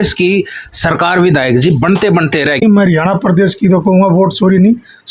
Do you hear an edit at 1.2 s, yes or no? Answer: no